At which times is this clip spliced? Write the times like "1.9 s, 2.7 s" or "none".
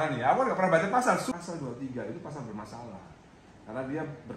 1.3 s

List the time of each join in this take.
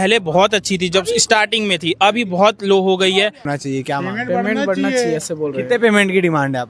3.5 s

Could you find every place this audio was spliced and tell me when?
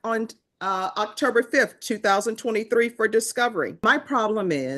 3.8 s

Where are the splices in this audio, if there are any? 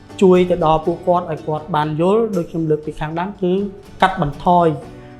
none

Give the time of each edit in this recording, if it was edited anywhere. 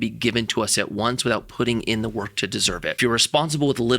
3.0 s

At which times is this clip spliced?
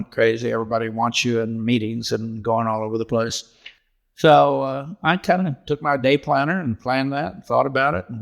3.9 s

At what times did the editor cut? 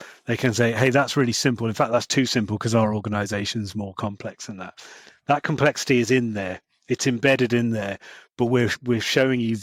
none

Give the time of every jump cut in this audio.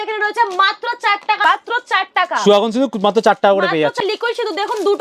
1.4 s, 4.0 s

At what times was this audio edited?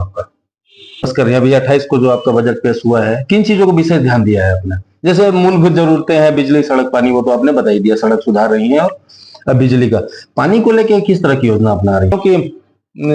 1.0 s, 12.2 s

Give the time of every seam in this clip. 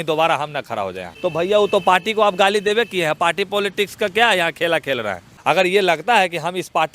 1.1 s, 5.3 s

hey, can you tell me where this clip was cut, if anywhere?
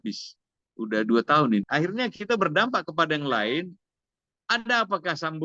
1.7 s

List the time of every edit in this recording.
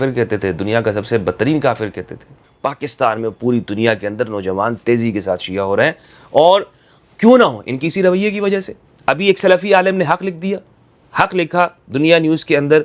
2.4 s

